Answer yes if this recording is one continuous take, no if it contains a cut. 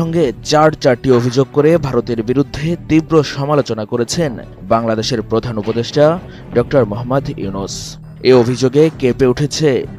yes